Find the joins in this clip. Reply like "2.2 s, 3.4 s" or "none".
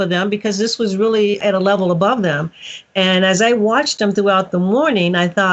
1.4 s